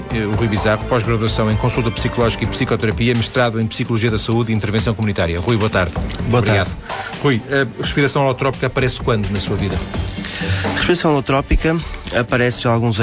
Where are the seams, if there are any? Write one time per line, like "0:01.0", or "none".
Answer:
none